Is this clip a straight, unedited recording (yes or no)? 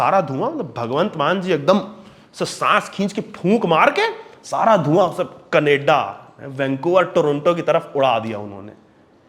yes